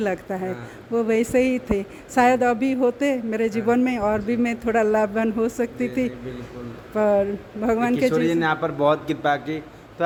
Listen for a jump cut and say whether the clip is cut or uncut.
uncut